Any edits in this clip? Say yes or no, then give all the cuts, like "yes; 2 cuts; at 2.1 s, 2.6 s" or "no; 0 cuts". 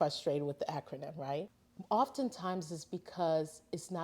yes; 1 cut; at 1.6 s